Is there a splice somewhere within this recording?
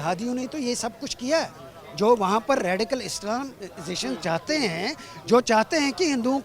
no; 0 cuts

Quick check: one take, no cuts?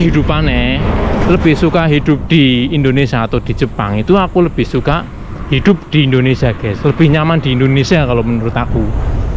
yes; 0 cuts

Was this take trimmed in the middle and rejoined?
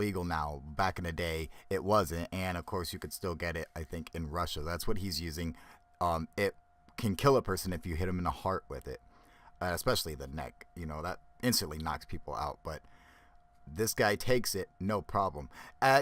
no; 0 cuts

